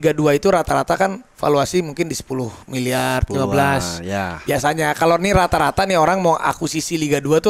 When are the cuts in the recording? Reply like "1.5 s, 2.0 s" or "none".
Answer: none